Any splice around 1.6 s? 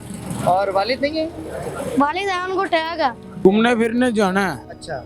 no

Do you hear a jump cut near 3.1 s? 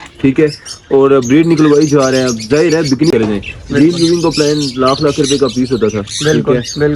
yes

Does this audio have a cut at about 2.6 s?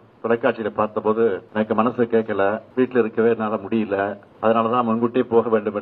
yes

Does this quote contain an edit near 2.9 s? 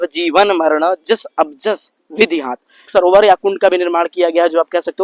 yes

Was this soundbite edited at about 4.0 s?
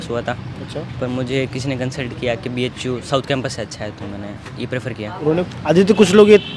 no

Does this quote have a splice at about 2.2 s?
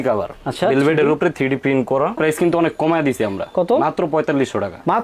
yes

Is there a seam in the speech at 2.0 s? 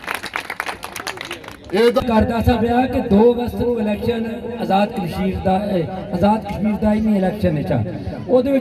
yes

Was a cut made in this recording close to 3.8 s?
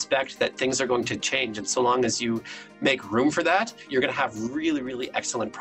yes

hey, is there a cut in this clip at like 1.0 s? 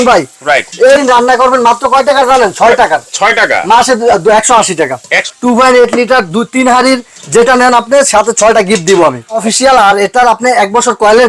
yes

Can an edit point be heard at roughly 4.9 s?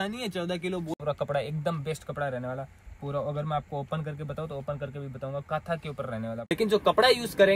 no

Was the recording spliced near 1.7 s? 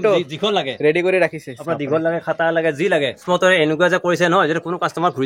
no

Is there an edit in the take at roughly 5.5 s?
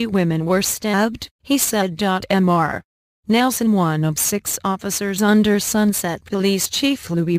no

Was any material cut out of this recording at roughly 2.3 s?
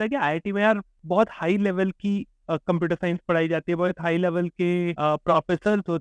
no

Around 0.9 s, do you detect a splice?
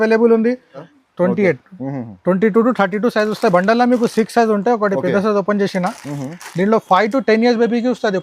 yes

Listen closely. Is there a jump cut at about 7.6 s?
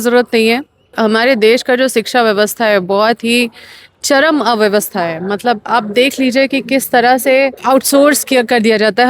yes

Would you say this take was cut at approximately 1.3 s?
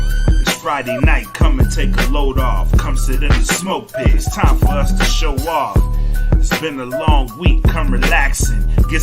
yes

